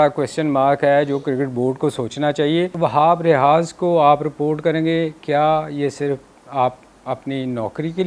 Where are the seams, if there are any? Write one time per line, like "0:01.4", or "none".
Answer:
0:02.7